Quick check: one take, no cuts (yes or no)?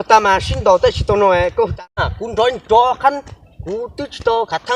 no